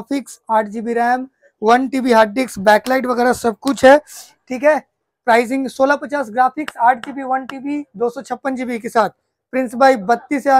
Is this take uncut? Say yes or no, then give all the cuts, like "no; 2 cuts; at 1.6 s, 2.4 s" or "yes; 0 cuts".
yes; 0 cuts